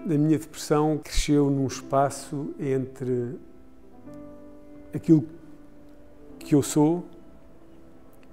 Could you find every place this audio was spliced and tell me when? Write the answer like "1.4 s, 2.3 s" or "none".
1.1 s